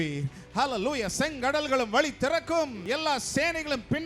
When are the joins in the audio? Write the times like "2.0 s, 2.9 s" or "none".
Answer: 2.8 s